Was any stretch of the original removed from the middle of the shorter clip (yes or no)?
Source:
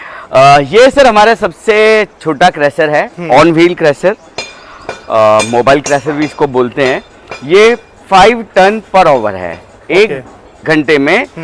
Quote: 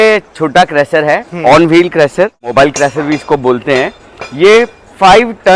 yes